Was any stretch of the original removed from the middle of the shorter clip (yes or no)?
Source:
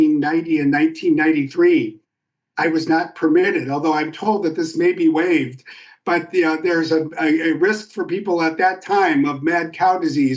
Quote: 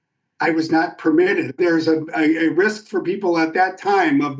yes